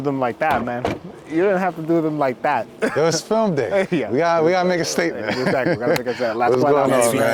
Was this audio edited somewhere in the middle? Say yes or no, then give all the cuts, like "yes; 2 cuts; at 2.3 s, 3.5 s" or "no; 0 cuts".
no; 0 cuts